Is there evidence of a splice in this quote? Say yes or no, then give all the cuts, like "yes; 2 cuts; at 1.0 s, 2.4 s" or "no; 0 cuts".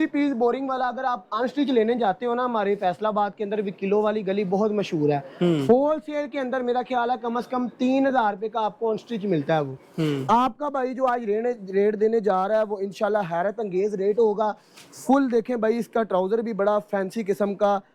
no; 0 cuts